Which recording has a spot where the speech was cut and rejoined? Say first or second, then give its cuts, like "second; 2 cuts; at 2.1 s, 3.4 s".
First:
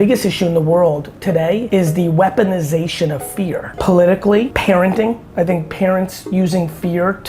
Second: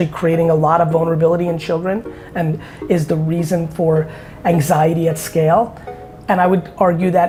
first; 4 cuts; at 1.4 s, 3.7 s, 4.5 s, 5.2 s